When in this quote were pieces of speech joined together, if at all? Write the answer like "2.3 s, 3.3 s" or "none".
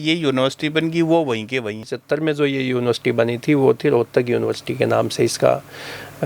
1.9 s